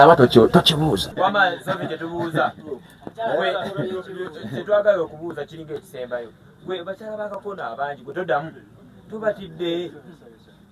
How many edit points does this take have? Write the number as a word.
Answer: one